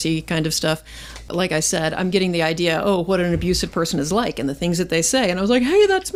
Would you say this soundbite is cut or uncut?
uncut